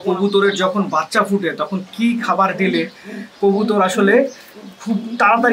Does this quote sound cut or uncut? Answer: uncut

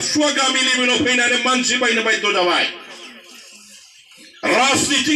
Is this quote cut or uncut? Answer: uncut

